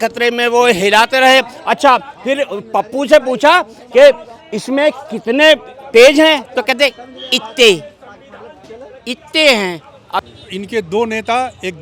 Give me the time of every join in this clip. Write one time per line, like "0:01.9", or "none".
0:10.2